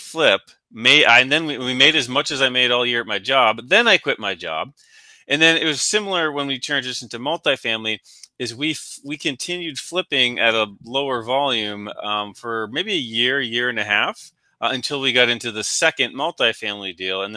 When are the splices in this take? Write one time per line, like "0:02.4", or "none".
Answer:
none

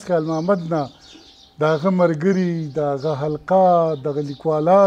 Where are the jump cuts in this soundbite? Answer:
none

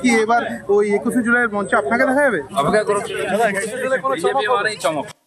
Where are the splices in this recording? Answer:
0:02.4

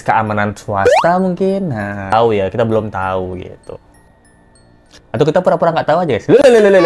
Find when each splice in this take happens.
0:02.1

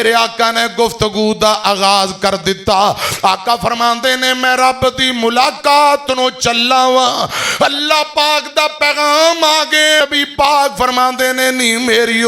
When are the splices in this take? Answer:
0:10.0

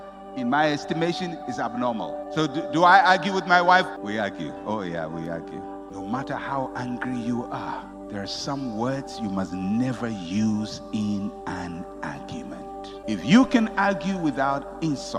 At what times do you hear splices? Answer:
0:04.0
0:05.9
0:12.9

